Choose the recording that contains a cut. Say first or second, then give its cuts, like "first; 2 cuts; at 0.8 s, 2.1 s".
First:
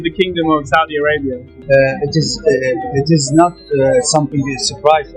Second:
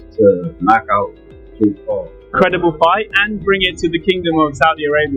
second; 1 cut; at 2.3 s